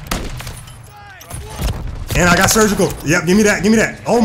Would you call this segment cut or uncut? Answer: uncut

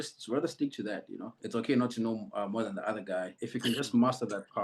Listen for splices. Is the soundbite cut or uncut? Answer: cut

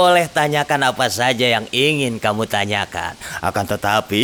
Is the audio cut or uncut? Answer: uncut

